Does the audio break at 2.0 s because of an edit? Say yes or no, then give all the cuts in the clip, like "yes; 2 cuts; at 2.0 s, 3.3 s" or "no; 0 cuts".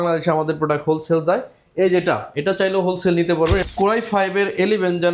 no; 1 cut; at 3.6 s